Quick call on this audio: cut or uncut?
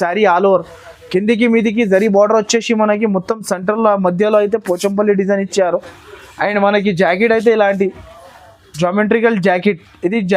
uncut